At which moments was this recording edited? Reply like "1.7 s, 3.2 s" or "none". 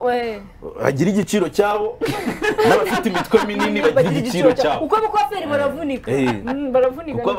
none